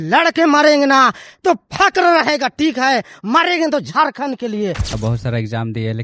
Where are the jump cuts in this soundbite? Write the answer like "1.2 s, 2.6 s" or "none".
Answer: 4.9 s

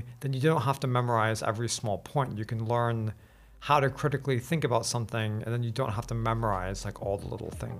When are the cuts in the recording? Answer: none

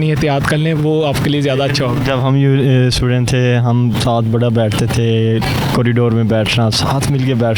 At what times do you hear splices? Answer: none

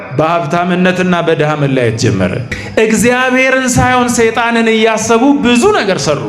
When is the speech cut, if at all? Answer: 2.5 s

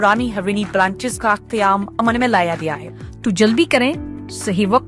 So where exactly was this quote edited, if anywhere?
2.8 s

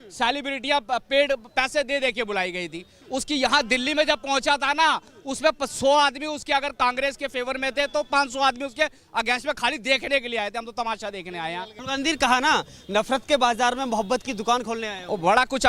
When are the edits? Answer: 11.8 s

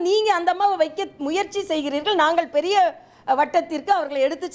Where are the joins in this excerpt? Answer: none

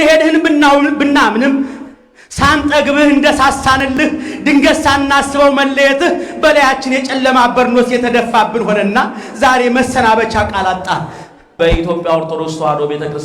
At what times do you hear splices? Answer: 11.6 s

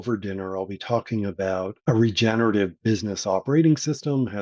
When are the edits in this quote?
1.7 s

